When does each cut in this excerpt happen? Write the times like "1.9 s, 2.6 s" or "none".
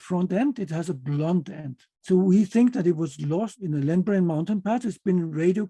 1.9 s